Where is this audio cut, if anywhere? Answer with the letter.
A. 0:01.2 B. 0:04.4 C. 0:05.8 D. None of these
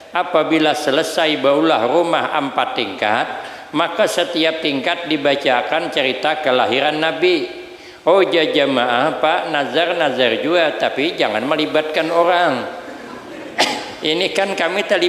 D